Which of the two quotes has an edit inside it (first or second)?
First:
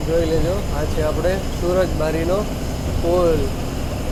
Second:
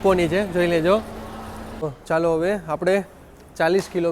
second